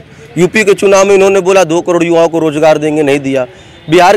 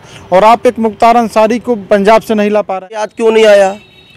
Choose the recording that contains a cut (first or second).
second